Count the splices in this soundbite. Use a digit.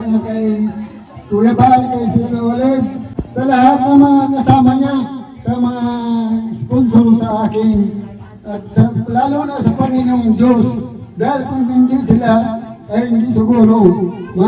0